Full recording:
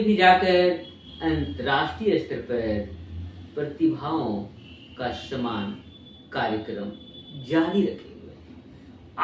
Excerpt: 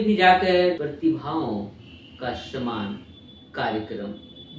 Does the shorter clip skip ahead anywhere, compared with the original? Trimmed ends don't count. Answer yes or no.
yes